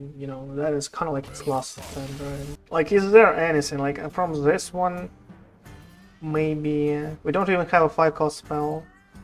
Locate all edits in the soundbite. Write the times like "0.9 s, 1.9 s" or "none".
2.6 s